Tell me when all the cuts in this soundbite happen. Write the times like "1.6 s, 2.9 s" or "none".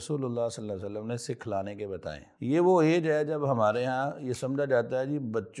2.3 s